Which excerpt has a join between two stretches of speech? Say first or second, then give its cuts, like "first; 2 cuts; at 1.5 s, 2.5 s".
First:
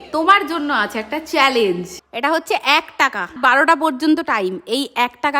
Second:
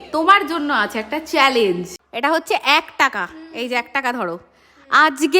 first; 1 cut; at 3.3 s